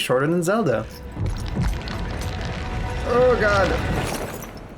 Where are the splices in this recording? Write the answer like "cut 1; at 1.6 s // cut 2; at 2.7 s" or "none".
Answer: cut 1; at 1.0 s